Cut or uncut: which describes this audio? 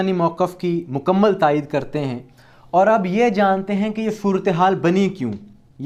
uncut